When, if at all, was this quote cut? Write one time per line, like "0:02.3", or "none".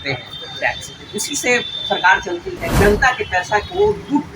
0:02.6